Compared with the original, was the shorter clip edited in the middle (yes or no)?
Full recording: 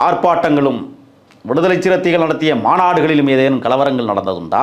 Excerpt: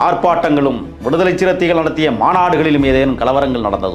yes